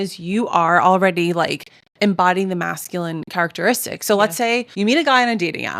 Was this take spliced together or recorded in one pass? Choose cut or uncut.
cut